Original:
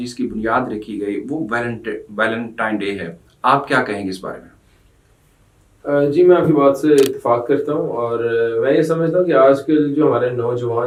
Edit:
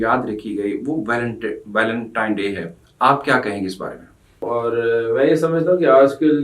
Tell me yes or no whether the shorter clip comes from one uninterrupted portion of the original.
no